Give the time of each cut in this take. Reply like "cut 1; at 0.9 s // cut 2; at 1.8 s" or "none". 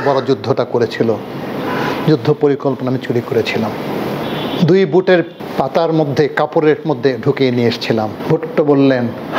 cut 1; at 4.2 s // cut 2; at 5.4 s // cut 3; at 8.2 s